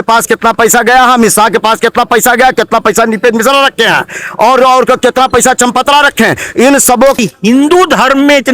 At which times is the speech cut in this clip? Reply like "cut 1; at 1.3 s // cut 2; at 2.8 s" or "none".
cut 1; at 7.2 s